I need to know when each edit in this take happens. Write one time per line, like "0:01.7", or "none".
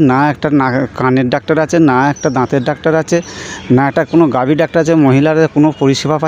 none